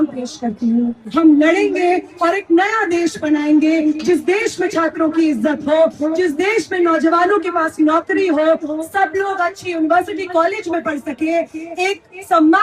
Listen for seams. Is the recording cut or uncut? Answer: cut